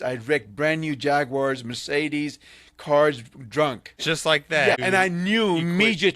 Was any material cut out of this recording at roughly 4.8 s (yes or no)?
yes